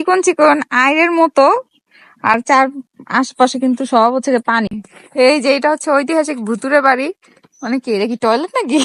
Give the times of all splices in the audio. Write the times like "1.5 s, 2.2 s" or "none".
4.7 s